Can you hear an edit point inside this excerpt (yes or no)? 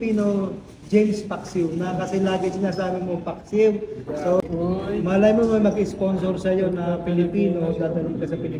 yes